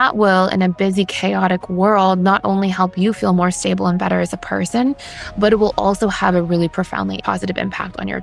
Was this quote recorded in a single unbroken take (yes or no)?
no